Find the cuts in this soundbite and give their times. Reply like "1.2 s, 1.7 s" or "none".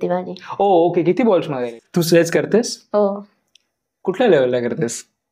1.7 s

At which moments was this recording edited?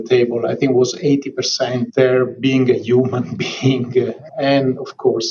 4.2 s

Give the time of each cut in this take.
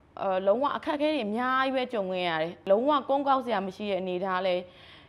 2.6 s

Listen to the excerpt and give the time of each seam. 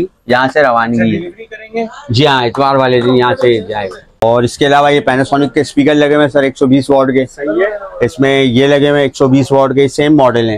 none

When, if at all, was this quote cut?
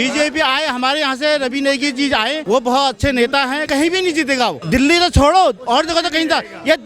2.4 s, 3.6 s, 4.6 s

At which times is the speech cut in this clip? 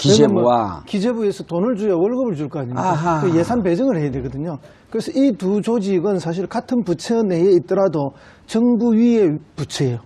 4.4 s

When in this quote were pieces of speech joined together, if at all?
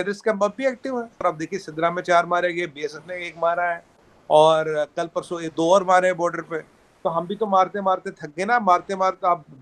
1.2 s

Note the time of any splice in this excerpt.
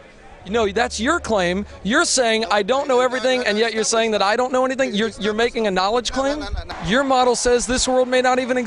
6.6 s

